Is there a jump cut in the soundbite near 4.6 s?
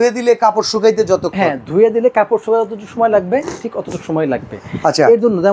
no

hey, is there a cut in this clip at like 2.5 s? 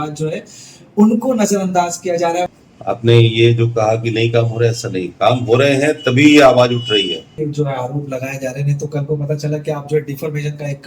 yes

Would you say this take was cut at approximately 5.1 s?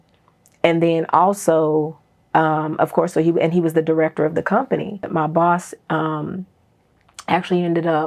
yes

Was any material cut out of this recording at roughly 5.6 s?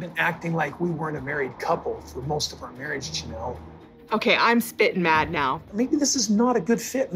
no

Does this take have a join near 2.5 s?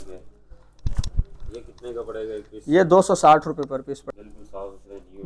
no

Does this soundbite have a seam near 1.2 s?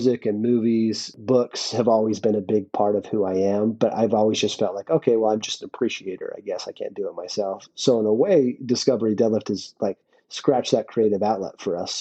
yes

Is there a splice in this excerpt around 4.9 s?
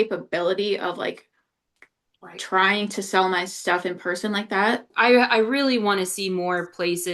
yes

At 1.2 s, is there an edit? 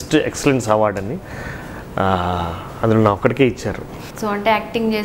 no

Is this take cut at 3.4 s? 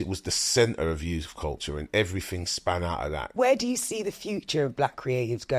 yes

